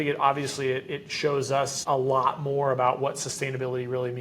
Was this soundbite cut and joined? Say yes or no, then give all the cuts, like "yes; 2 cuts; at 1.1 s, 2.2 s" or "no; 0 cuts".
yes; 1 cut; at 1.8 s